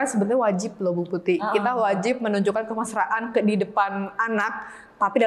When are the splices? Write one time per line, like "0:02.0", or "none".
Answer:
none